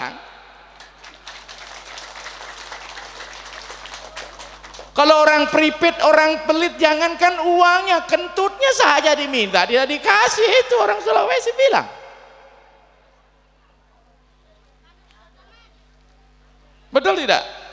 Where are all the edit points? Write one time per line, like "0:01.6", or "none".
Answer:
none

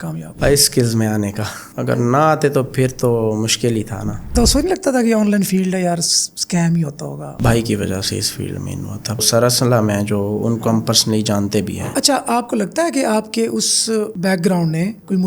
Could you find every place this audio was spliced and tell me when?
0:04.3
0:07.3
0:09.2
0:11.9

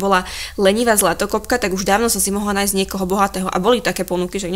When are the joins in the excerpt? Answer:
none

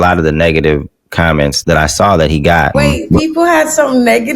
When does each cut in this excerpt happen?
0:01.6
0:02.7

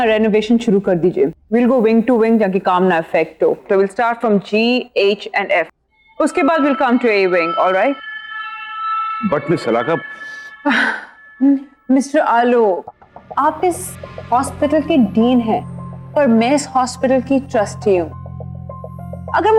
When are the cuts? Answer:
none

